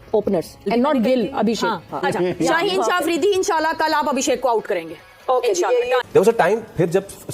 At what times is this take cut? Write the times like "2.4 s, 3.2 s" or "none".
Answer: 1.9 s, 6.0 s